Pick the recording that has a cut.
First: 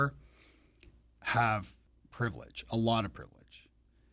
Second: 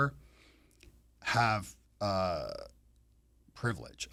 first; 1 cut; at 1.8 s

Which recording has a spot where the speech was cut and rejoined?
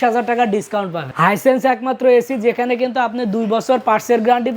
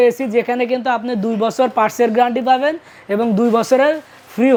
first; 1 cut; at 1.0 s

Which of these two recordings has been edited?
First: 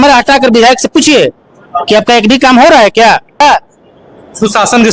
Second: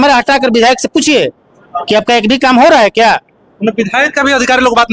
first; 1 cut; at 3.4 s

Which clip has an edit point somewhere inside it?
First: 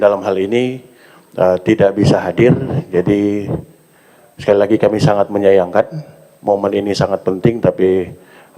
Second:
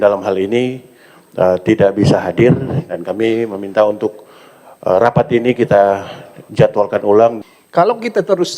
second; 2 cuts; at 2.8 s, 7.4 s

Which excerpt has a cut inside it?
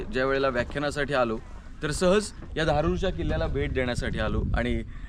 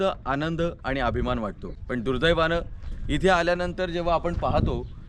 second; 1 cut; at 1.7 s

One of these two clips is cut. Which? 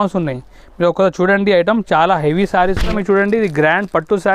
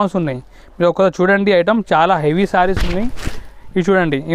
first; 1 cut; at 2.9 s

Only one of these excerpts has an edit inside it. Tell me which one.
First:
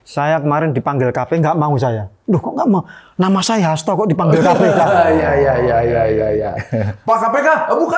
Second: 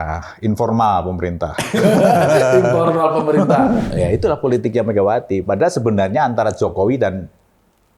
second; 1 cut; at 3.8 s

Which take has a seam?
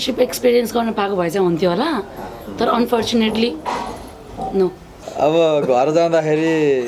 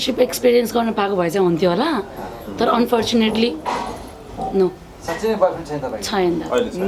first; 1 cut; at 4.9 s

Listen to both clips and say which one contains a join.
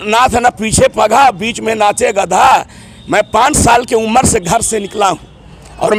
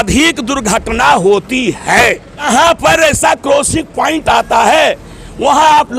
second; 1 cut; at 2.4 s

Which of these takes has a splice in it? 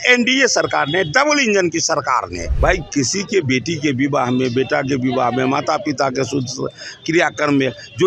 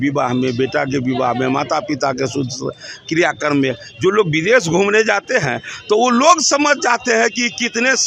first; 1 cut; at 2.4 s

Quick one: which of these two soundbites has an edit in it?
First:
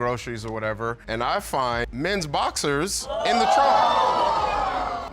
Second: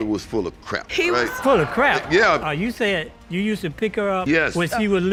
first; 1 cut; at 1.9 s

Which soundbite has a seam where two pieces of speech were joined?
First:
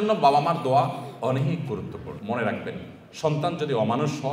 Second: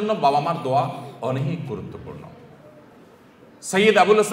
first; 1 cut; at 2.2 s

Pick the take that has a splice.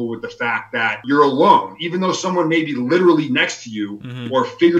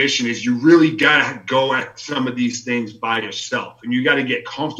first; 1 cut; at 1.0 s

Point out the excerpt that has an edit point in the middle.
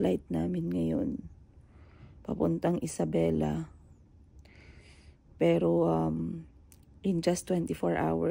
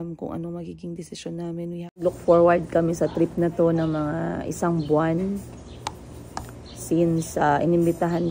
second; 1 cut; at 2.0 s

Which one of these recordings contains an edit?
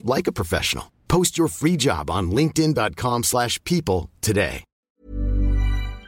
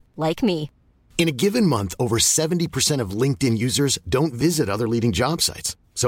first; 1 cut; at 4.8 s

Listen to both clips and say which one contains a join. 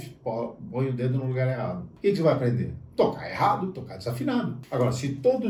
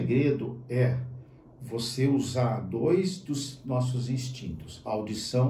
first; 2 cuts; at 1.9 s, 4.6 s

